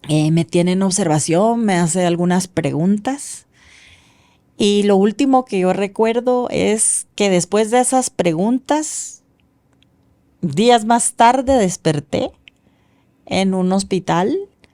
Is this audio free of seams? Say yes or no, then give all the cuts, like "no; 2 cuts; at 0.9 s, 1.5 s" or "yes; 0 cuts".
yes; 0 cuts